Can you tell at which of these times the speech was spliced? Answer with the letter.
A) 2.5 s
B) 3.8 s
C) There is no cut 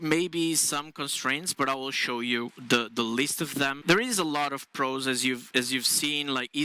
B